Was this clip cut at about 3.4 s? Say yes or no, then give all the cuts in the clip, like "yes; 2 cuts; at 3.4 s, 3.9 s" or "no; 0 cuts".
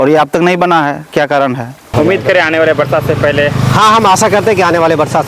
no; 1 cut; at 1.9 s